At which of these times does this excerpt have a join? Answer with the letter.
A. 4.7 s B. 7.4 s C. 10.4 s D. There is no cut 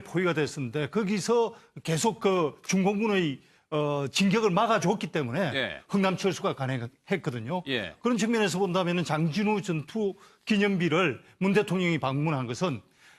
A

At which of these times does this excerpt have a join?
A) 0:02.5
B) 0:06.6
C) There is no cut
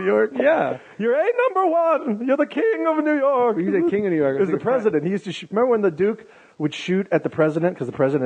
A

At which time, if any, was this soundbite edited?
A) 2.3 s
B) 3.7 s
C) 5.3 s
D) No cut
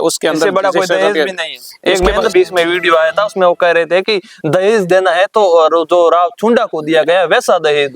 A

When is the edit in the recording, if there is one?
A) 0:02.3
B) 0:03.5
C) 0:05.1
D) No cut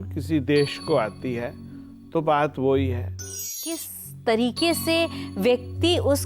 B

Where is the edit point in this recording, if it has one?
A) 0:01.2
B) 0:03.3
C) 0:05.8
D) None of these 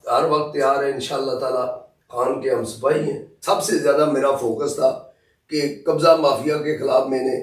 B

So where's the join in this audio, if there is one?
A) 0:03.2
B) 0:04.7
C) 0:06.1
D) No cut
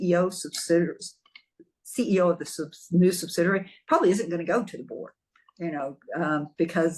D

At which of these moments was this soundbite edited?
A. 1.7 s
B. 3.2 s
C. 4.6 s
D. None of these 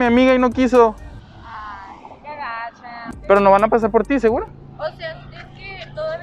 B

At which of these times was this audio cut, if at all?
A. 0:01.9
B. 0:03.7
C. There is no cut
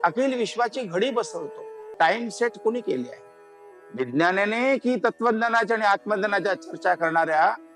A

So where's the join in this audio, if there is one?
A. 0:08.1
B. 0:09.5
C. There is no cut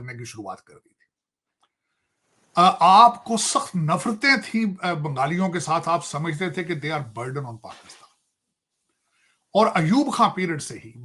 C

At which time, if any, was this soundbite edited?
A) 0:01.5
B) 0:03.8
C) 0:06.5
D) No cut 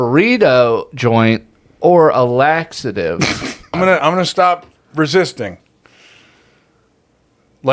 B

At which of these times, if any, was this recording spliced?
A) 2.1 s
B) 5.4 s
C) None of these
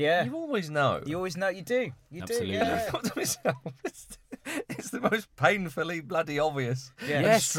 C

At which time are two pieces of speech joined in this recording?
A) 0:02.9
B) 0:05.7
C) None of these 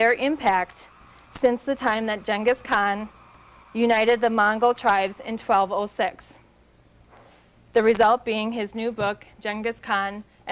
A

